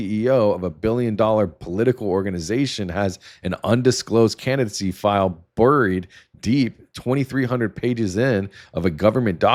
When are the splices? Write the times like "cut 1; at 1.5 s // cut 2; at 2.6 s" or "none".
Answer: none